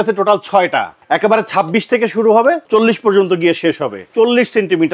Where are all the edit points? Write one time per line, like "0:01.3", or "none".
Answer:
0:00.9
0:02.6
0:04.1